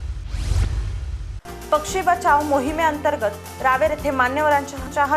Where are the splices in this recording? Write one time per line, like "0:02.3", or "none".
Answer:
0:01.3